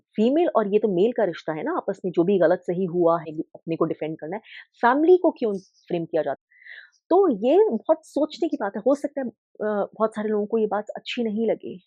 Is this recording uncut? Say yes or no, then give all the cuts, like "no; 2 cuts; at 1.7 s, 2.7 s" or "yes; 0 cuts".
no; 2 cuts; at 3.3 s, 6.4 s